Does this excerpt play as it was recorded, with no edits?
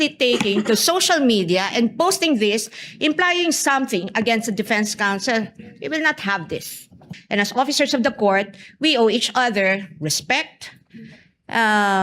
no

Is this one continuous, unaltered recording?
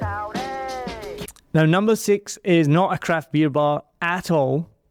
yes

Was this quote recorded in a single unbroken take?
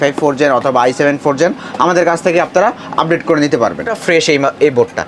no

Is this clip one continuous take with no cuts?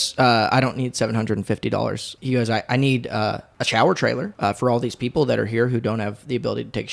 no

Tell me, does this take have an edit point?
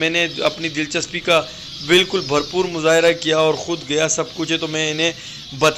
no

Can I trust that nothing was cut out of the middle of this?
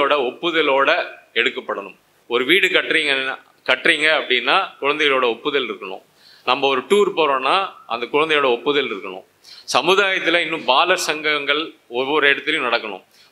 no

